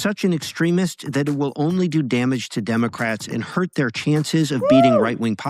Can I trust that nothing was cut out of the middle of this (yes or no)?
no